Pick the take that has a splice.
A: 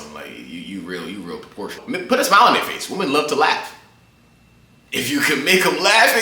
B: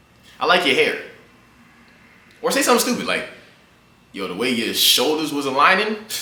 A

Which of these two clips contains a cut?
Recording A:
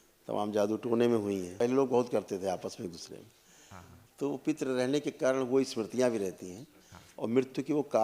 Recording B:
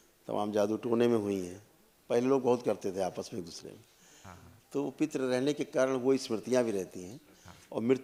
A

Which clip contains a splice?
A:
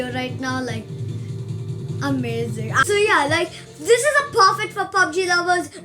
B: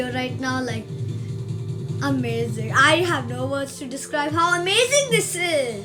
A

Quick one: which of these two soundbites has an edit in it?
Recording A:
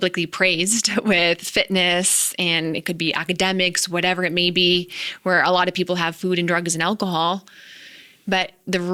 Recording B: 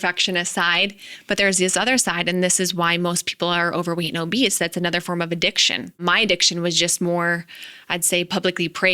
B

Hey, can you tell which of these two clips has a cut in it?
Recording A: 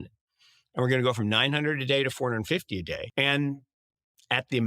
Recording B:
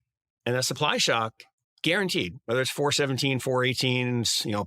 A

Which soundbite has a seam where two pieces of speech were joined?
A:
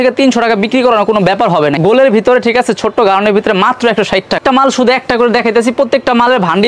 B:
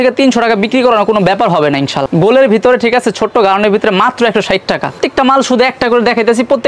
A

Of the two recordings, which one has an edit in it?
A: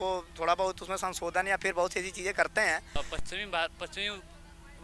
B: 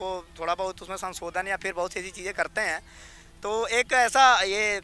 A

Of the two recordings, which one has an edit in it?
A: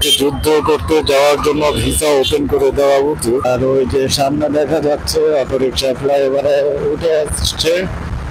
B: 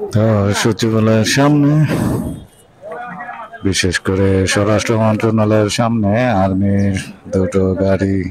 A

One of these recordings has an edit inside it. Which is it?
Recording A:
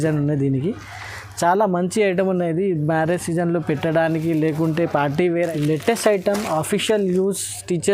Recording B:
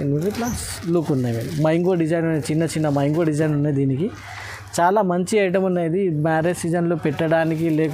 A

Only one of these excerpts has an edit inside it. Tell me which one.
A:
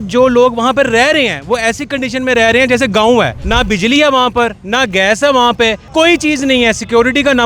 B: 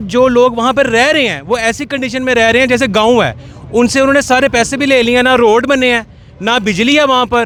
A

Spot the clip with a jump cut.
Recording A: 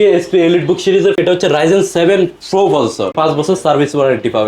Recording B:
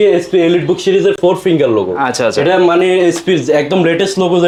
A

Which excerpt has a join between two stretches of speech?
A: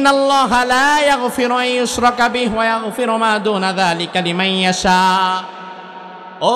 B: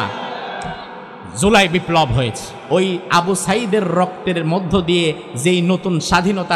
B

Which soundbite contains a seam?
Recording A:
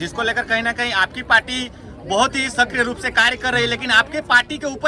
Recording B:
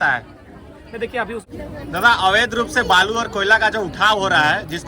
B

